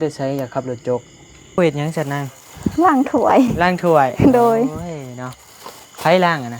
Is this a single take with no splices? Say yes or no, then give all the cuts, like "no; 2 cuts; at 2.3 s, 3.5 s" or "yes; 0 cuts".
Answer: no; 1 cut; at 1.6 s